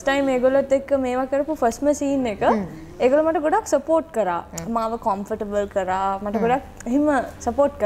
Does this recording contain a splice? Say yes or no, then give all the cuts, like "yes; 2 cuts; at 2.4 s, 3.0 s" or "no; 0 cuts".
no; 0 cuts